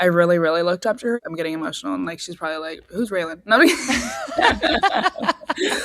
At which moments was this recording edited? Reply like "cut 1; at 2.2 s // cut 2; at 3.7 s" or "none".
cut 1; at 1.2 s